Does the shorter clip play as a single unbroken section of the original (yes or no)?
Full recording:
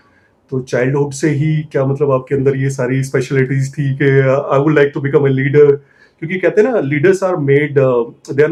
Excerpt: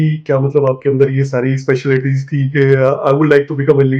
yes